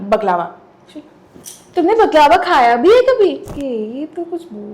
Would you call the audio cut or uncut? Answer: cut